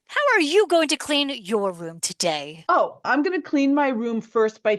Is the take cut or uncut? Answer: cut